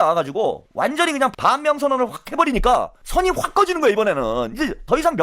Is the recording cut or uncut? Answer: cut